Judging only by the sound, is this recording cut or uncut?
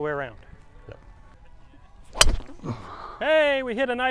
cut